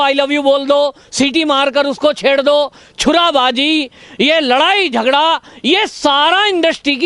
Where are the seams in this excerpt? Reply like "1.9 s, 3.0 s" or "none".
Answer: none